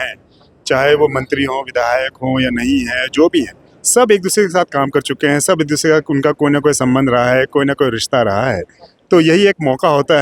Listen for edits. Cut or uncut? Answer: uncut